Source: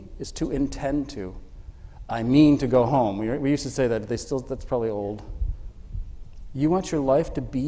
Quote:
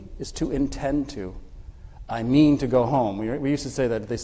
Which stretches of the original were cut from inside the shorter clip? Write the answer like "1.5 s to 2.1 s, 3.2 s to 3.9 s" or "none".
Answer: none